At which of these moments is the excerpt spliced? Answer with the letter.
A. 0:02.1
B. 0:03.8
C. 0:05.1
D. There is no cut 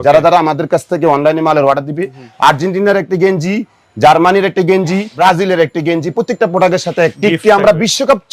C